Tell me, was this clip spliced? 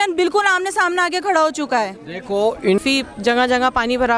yes; 1 cut; at 2.8 s

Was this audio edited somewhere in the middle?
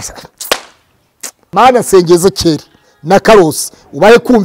yes; 1 cut; at 1.4 s

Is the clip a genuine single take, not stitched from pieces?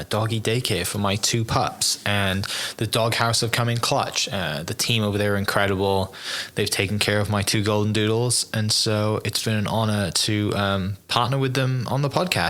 yes; 0 cuts

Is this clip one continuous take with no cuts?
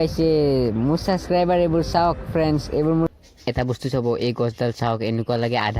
no; 1 cut; at 3.1 s

